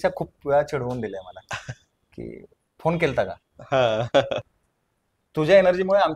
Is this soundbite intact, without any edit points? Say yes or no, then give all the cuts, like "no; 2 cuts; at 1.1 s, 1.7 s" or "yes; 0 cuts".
no; 1 cut; at 4.4 s